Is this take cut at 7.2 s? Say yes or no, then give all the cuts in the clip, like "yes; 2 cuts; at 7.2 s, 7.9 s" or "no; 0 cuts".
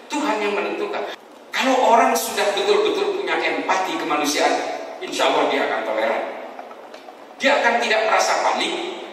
no; 1 cut; at 1.1 s